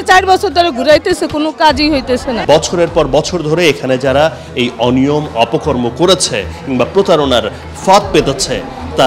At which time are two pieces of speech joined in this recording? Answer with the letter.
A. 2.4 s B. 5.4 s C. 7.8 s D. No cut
A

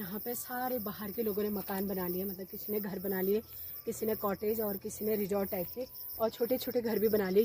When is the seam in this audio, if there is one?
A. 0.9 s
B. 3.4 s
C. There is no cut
C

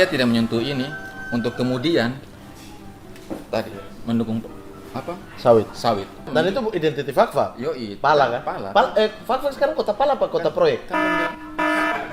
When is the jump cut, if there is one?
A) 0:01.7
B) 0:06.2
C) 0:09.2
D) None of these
B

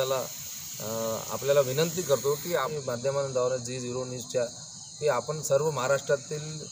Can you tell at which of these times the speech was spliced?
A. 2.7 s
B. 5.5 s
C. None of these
A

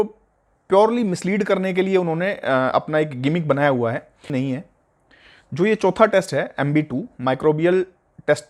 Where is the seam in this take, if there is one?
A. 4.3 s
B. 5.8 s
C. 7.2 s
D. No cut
A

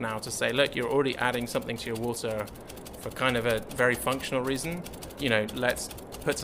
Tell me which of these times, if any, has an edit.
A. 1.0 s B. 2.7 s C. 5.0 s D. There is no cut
C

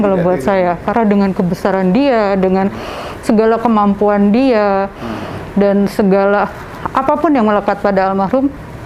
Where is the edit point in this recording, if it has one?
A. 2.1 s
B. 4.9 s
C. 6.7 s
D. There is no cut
D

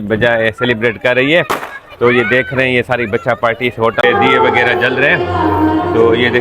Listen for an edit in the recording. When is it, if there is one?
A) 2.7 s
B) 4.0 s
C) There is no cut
B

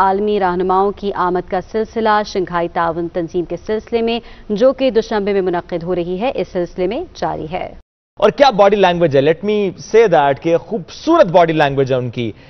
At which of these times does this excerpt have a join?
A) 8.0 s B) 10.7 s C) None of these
A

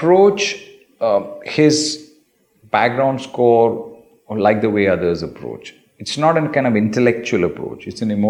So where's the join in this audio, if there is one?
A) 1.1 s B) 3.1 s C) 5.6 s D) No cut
D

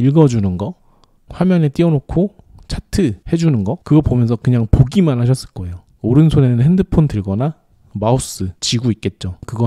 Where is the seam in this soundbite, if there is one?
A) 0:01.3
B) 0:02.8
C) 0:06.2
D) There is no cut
A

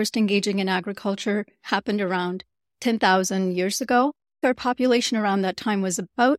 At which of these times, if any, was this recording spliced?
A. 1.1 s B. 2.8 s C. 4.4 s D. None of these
C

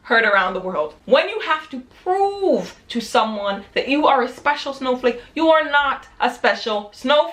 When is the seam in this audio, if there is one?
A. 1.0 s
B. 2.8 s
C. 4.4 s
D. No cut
A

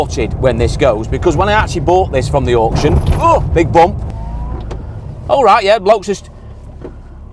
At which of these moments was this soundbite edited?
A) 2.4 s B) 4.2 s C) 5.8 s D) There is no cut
B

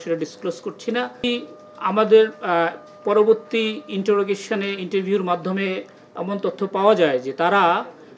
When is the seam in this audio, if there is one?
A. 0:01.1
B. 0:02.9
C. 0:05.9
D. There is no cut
A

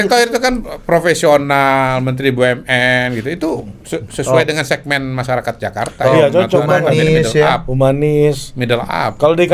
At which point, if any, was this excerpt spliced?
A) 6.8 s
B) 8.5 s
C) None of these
C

